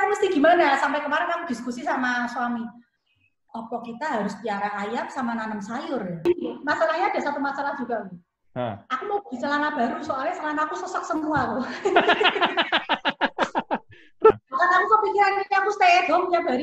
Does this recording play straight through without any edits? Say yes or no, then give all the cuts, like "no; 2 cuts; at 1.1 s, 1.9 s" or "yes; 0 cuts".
no; 2 cuts; at 6.3 s, 14.4 s